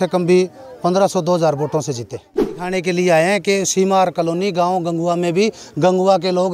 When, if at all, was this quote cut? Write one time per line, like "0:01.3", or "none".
0:02.7